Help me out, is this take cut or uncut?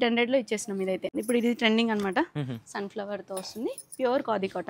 cut